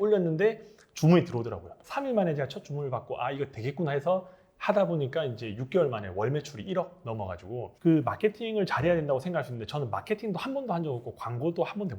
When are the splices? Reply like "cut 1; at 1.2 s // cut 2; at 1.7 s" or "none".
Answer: cut 1; at 1.8 s // cut 2; at 7.7 s